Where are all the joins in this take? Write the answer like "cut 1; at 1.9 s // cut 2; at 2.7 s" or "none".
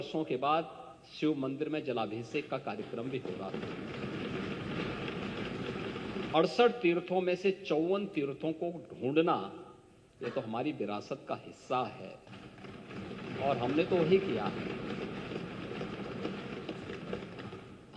cut 1; at 6.3 s